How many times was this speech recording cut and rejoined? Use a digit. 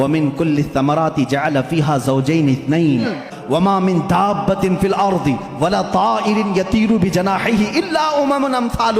1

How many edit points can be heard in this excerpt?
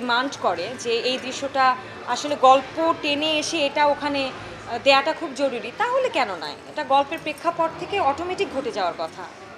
0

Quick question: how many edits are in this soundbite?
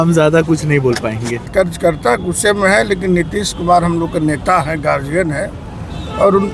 1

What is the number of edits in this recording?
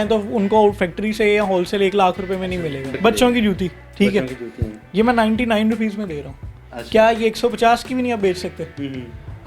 1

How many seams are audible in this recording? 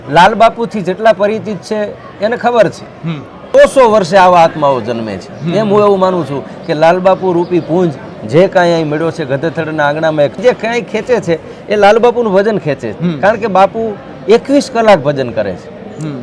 2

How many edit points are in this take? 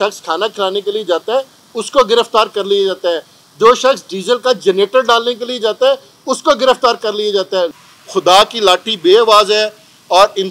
1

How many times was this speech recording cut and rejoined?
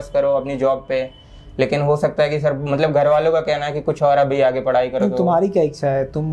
0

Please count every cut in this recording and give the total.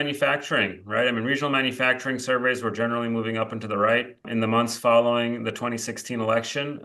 1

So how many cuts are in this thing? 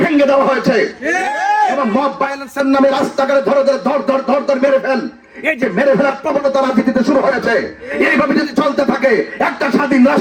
0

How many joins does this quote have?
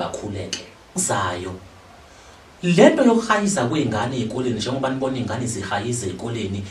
1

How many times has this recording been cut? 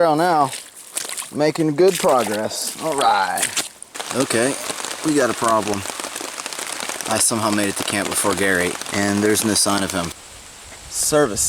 3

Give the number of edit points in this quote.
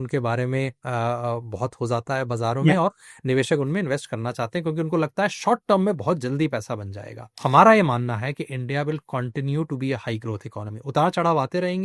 1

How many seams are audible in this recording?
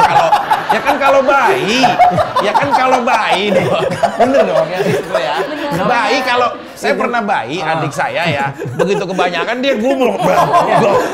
0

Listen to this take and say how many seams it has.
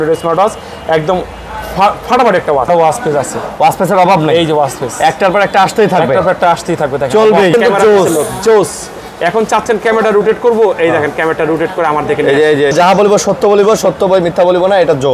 3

